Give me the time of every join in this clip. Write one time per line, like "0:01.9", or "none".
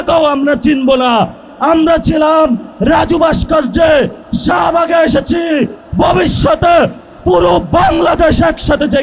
0:01.4